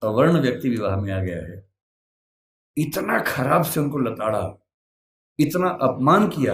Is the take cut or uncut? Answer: uncut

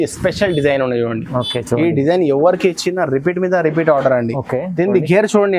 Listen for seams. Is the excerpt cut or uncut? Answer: uncut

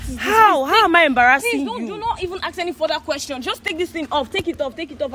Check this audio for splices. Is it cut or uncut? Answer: uncut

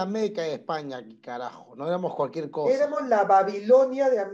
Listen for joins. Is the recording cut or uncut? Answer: uncut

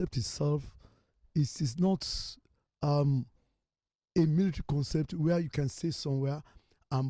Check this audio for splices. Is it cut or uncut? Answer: uncut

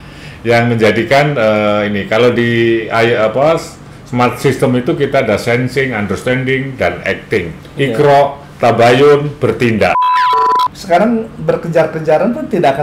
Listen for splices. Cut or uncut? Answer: cut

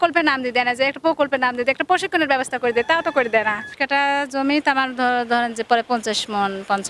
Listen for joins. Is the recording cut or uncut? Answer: cut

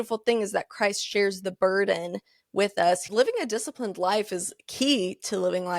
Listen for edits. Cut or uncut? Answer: cut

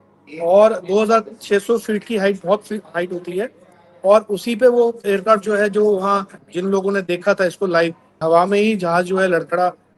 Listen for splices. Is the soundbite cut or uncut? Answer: cut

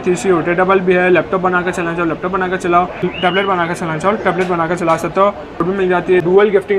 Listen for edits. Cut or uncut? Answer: cut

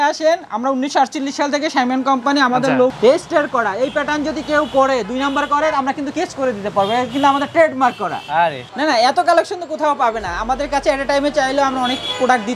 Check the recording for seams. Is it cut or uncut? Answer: cut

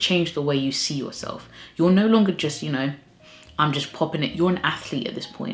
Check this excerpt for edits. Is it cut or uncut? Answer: uncut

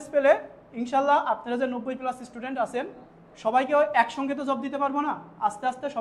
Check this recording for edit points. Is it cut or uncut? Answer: uncut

